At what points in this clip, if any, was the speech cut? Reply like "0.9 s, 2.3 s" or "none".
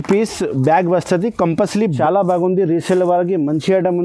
2.0 s